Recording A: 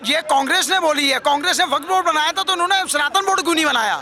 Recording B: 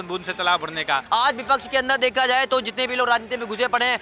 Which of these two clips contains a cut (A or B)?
B